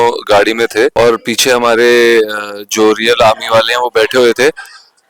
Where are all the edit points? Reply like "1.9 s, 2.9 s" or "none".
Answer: 0.9 s